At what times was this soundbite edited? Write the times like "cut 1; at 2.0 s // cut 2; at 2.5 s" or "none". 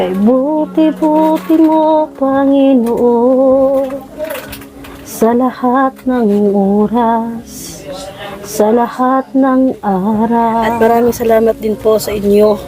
cut 1; at 10.7 s